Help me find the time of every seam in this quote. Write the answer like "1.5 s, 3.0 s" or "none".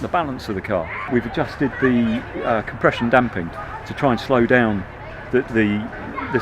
1.1 s